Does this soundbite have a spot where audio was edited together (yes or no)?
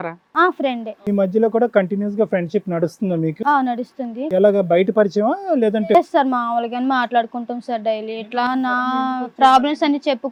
no